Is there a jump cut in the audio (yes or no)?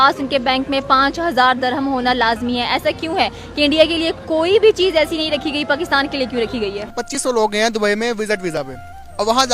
yes